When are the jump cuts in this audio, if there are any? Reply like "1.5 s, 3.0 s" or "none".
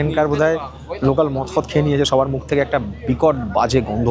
none